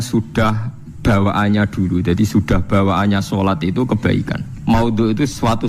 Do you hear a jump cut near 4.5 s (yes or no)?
yes